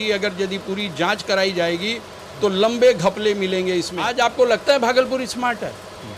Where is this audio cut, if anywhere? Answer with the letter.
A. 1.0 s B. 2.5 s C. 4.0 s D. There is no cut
C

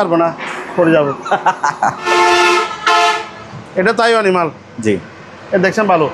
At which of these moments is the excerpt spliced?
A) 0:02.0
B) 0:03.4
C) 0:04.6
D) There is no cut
A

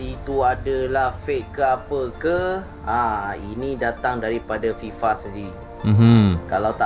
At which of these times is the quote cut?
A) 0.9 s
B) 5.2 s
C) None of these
C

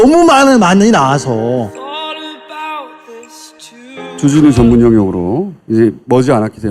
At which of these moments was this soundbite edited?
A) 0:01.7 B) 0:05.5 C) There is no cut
A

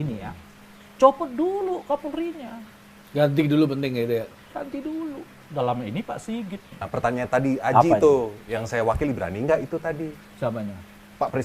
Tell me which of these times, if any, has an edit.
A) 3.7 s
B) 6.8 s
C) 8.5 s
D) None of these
B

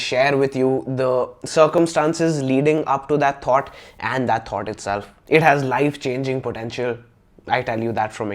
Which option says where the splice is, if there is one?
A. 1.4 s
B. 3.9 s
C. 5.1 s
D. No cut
C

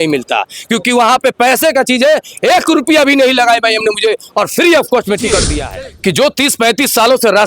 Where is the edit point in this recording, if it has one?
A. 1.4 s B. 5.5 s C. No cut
B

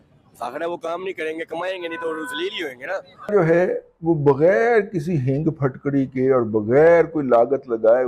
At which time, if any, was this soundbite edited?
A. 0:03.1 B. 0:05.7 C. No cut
A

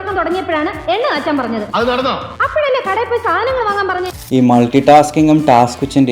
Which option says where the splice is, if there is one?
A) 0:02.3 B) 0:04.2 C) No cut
B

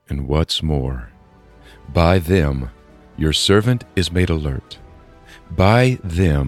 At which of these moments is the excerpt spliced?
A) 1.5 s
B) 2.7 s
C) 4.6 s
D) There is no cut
D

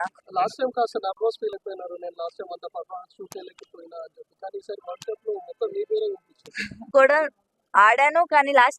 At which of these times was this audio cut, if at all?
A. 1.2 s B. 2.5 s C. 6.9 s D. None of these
C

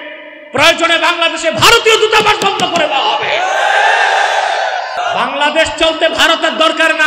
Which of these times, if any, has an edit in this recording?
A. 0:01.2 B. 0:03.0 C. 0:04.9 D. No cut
C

